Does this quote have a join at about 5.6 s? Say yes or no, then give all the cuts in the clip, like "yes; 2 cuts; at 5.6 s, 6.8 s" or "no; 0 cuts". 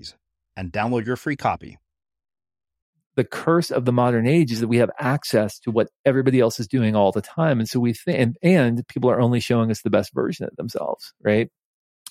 no; 1 cut; at 3.0 s